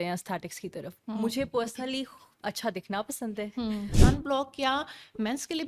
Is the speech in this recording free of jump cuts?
no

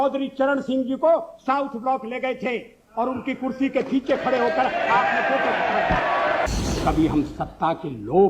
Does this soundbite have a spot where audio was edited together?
yes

